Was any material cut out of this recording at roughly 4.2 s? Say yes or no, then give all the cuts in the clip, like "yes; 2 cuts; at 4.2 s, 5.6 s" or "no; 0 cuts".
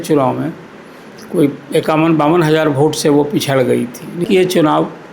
yes; 1 cut; at 4.2 s